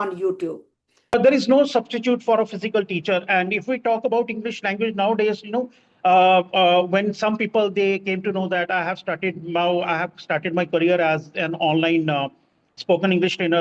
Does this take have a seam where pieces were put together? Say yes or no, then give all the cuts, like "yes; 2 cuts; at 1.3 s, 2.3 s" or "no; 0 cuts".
yes; 1 cut; at 1.1 s